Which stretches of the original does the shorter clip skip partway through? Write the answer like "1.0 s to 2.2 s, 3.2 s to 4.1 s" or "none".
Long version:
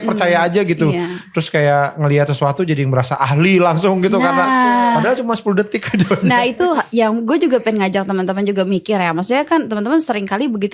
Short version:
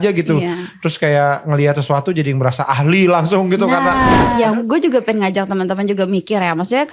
4.8 s to 6.9 s